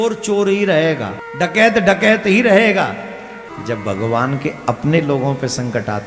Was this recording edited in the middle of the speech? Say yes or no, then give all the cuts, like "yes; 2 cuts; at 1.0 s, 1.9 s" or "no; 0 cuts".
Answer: yes; 2 cuts; at 1.2 s, 3.5 s